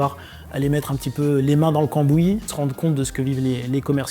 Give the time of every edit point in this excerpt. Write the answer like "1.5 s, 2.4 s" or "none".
2.5 s

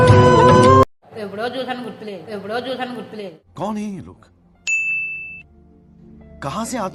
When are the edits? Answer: none

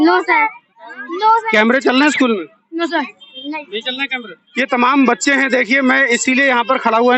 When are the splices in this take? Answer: 1.5 s, 4.4 s

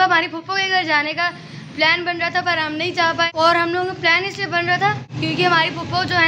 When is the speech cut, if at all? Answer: 3.3 s, 5.1 s

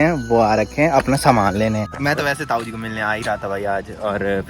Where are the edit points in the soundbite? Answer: 1.9 s

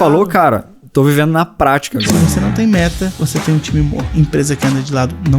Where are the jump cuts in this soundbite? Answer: 2.1 s, 3.1 s, 4.0 s

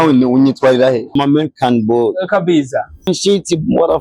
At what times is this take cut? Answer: 1.1 s, 3.1 s

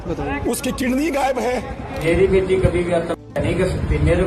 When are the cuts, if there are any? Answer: 1.9 s

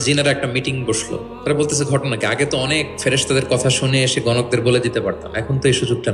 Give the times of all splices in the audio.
1.3 s

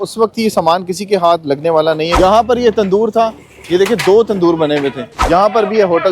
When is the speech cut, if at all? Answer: 2.1 s, 5.1 s

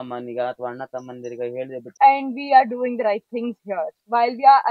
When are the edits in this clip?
1.9 s

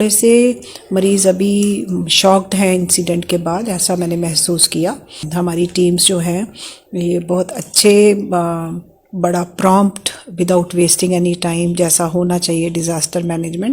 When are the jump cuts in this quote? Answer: 5.2 s

